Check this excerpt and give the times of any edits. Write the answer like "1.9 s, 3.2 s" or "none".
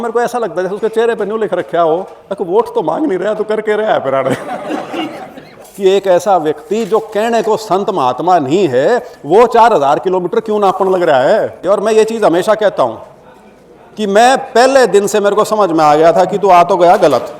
5.6 s, 11.6 s